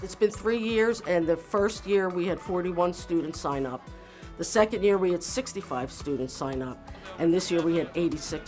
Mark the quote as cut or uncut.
uncut